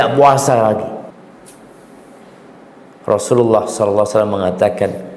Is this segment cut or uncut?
cut